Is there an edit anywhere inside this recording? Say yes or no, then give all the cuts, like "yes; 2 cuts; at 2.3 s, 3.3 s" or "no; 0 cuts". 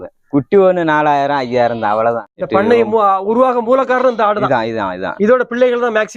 yes; 1 cut; at 2.3 s